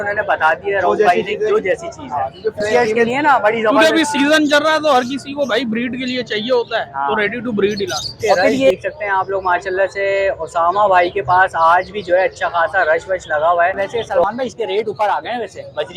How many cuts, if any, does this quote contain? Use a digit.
3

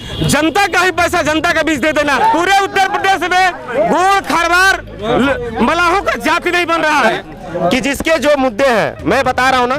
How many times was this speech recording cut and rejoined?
2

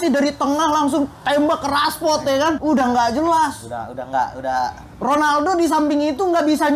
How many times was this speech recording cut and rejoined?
1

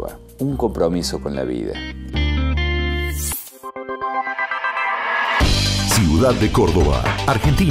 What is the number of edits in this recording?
0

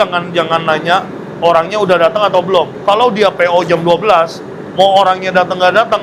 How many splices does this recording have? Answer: 0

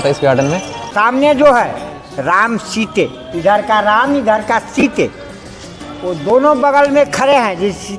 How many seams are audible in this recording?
1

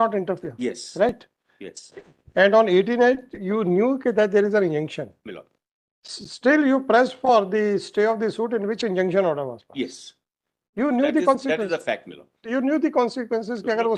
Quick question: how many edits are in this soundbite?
0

